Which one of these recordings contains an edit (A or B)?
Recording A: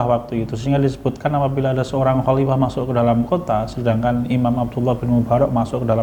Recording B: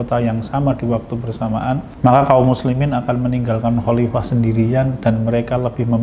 B